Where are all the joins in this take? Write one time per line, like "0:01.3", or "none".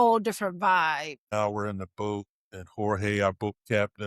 0:01.3